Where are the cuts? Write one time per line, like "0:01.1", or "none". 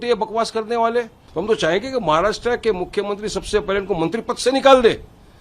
0:01.2